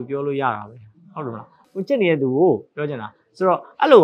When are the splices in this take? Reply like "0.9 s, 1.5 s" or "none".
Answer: 1.5 s